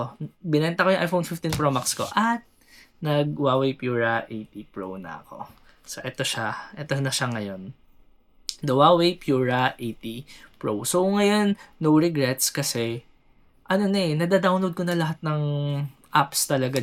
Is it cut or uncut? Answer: uncut